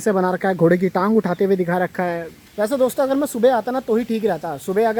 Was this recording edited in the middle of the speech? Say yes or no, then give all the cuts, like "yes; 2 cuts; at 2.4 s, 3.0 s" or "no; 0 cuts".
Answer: no; 0 cuts